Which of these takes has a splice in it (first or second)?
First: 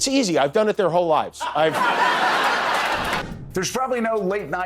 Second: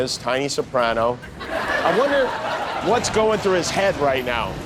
first